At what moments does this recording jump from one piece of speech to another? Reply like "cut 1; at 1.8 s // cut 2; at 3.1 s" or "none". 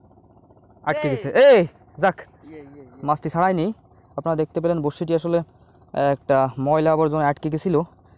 none